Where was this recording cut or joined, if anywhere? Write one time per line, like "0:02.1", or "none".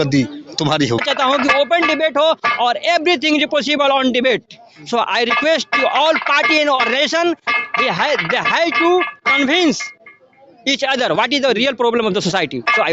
0:01.0

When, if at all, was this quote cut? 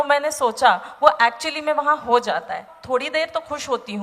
0:02.7

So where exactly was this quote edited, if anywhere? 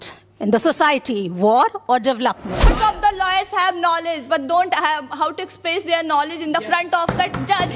0:02.7

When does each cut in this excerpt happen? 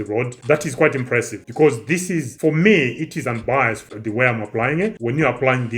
0:03.9

